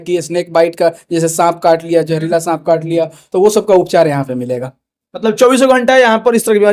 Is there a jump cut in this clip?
no; 0 cuts

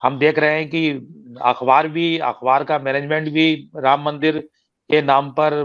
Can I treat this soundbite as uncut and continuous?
yes; 0 cuts

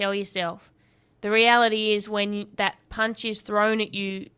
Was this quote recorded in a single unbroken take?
yes; 0 cuts

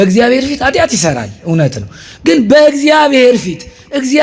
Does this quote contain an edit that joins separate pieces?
no; 0 cuts

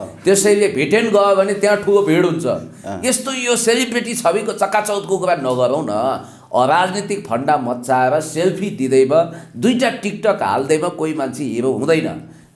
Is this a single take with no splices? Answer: yes; 0 cuts

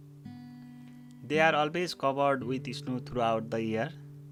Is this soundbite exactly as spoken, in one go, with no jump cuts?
yes; 0 cuts

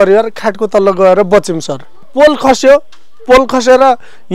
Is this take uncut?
no; 1 cut; at 2.1 s

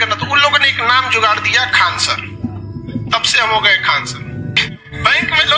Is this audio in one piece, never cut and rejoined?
yes; 0 cuts

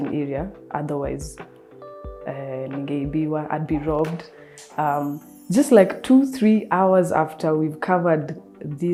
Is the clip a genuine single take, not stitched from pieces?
yes; 0 cuts

